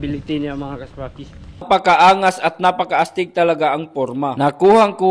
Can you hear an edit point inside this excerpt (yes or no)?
yes